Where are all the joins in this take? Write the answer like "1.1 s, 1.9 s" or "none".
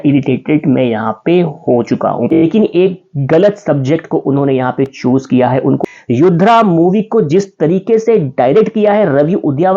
2.3 s, 5.8 s